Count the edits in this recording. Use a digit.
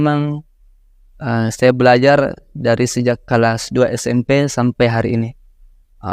0